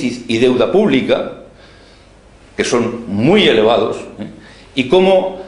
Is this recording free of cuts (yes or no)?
yes